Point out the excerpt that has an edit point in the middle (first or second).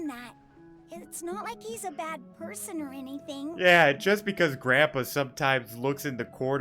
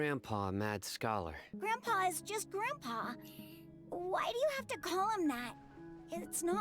second